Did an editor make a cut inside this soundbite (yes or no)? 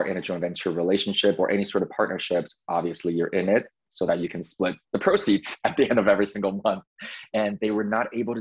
no